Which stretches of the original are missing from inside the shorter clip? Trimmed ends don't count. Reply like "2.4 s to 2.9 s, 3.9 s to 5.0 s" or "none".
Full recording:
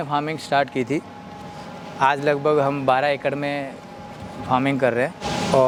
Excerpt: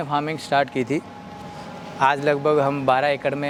none